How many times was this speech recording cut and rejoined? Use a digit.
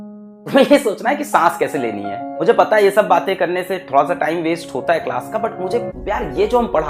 1